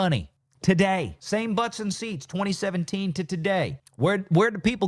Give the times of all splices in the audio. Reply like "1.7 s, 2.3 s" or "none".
1.2 s, 3.8 s

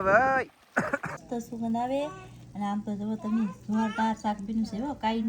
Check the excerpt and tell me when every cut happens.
1.2 s

